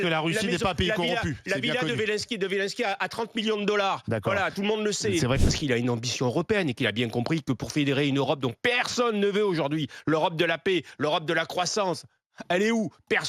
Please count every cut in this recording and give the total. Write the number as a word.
one